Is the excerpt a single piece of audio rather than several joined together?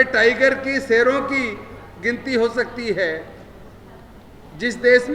yes; 0 cuts

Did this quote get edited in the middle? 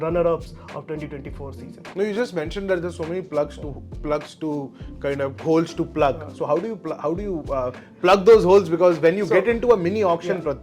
no; 0 cuts

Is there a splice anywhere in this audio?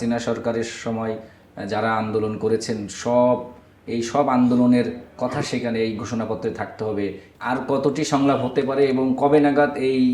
yes; 1 cut; at 7.3 s

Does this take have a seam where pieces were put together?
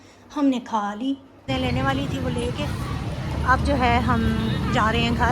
yes; 1 cut; at 1.5 s

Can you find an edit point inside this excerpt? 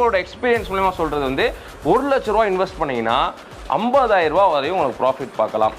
no; 0 cuts

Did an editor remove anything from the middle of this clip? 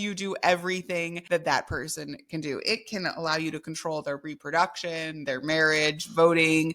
yes; 1 cut; at 1.2 s

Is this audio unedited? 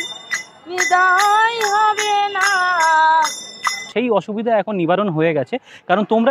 no; 1 cut; at 3.9 s

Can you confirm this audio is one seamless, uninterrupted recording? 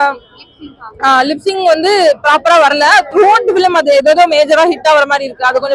yes; 0 cuts

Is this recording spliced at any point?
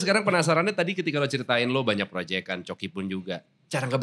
no; 0 cuts

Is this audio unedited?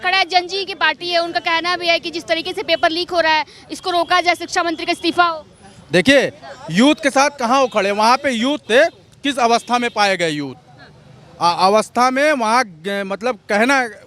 yes; 0 cuts

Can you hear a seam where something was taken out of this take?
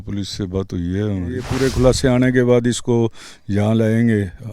yes; 1 cut; at 1.5 s

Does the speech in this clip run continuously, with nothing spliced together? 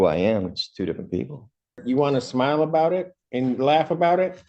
no; 1 cut; at 1.8 s

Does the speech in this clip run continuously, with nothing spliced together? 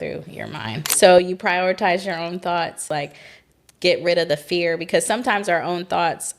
no; 2 cuts; at 0.9 s, 2.8 s

